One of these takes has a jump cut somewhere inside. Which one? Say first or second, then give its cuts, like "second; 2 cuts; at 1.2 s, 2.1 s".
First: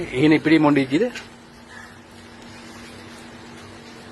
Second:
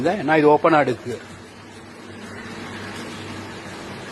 first; 1 cut; at 1.4 s